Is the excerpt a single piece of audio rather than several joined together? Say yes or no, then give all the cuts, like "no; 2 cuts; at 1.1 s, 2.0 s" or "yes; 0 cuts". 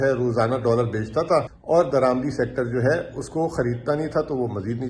no; 1 cut; at 1.5 s